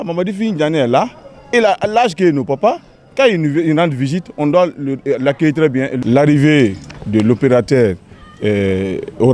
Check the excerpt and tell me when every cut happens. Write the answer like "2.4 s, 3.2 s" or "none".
5.9 s